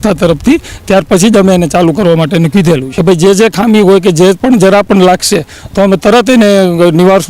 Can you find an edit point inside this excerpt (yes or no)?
yes